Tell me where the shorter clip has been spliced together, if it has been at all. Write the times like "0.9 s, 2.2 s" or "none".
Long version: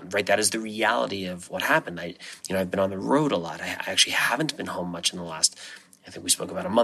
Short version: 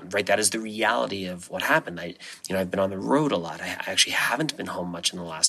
none